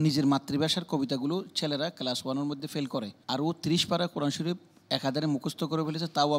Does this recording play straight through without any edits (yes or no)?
no